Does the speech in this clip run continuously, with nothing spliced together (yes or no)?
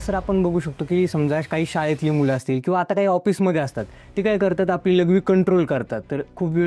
yes